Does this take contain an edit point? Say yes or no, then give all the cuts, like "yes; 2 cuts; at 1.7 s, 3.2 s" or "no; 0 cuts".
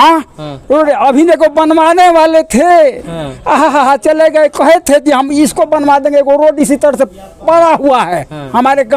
no; 0 cuts